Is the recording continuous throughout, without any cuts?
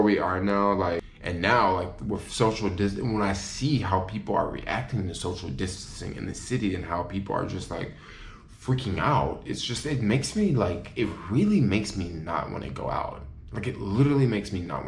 no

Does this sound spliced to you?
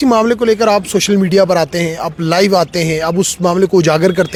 no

